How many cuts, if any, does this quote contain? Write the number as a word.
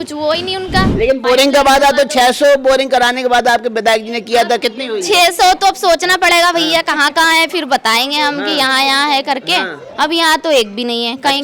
one